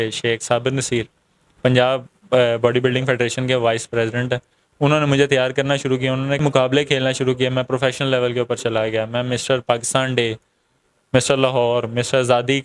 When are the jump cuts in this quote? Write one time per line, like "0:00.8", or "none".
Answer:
0:06.4